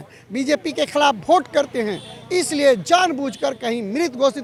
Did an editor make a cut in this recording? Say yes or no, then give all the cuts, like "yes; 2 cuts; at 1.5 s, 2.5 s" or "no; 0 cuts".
no; 0 cuts